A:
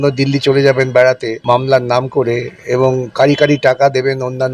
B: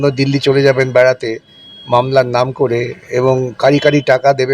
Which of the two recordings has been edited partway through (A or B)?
A